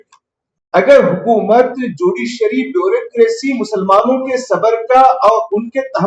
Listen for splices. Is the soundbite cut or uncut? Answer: uncut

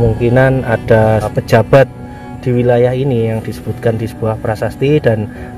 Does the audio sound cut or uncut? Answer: cut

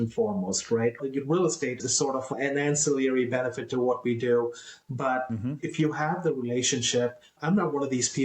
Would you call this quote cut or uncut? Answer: cut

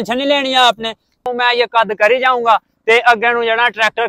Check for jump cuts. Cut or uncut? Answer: cut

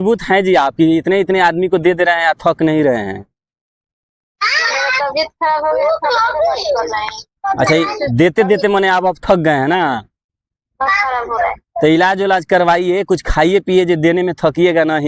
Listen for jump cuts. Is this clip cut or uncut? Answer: uncut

